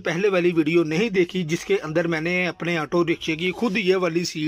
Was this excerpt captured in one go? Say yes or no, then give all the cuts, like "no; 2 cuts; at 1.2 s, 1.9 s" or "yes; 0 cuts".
yes; 0 cuts